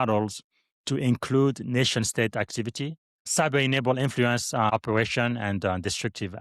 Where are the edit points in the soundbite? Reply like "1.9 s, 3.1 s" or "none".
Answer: 3.2 s, 4.7 s